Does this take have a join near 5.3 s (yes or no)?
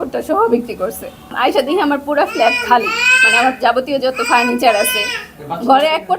no